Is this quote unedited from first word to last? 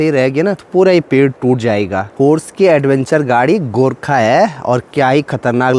no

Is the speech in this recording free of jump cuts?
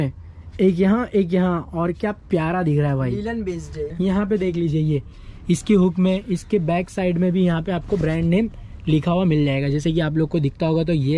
no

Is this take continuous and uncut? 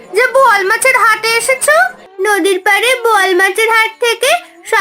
no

